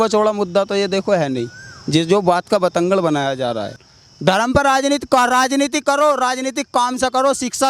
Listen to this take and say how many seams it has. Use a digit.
0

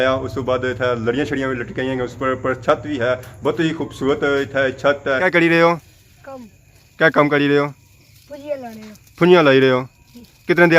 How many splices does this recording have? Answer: 1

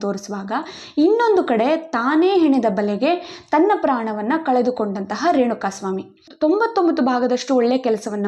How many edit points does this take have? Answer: 1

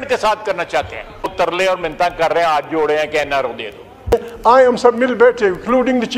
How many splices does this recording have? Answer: 2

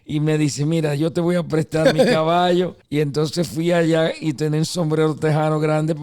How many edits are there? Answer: 1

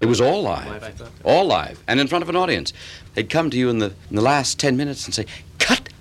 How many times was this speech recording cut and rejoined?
2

